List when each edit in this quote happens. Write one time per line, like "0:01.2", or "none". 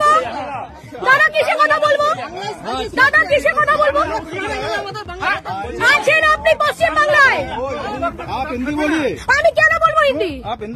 0:08.2